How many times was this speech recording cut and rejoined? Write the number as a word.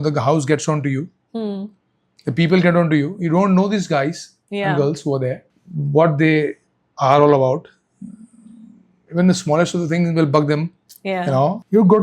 zero